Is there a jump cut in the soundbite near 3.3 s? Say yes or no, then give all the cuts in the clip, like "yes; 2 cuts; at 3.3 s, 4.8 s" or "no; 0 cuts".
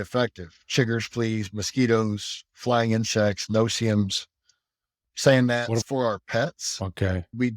no; 1 cut; at 5.8 s